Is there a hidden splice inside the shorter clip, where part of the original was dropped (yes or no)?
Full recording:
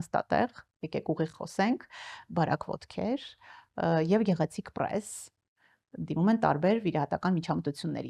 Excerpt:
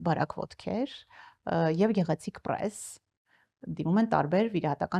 no